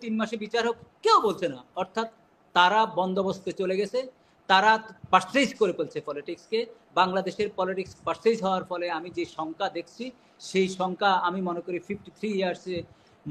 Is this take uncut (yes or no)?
yes